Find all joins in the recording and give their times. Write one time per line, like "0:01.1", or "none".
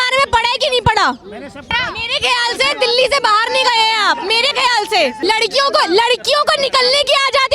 0:01.8
0:05.2